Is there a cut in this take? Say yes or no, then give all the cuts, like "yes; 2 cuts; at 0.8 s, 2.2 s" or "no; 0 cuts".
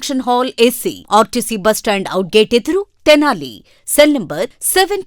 no; 0 cuts